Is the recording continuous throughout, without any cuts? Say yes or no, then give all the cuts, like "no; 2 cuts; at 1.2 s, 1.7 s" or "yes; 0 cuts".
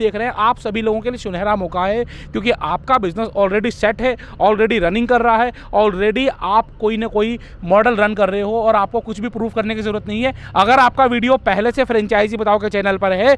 yes; 0 cuts